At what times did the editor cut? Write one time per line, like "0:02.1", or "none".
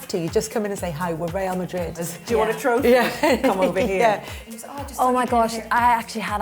0:02.1
0:04.4